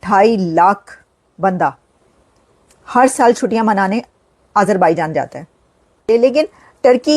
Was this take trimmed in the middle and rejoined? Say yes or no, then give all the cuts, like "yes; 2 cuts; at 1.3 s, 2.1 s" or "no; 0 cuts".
yes; 1 cut; at 6.0 s